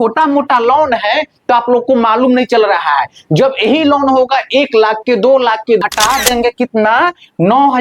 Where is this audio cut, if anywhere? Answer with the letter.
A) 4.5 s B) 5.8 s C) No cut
B